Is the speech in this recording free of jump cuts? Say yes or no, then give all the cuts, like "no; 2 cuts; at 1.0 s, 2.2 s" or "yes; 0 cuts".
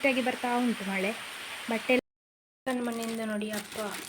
no; 1 cut; at 2.0 s